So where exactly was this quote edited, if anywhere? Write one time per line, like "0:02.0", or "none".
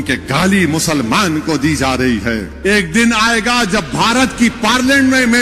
0:02.5